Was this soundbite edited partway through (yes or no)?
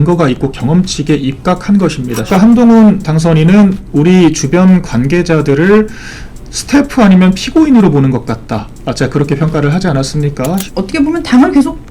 yes